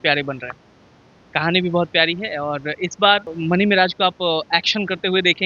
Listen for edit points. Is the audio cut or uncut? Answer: cut